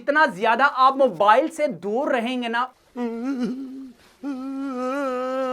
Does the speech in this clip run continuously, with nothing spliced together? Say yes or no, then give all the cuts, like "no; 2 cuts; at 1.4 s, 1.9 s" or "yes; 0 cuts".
no; 1 cut; at 2.8 s